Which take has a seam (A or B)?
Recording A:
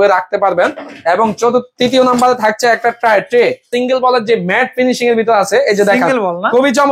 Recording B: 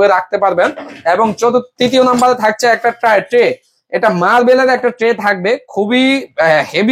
A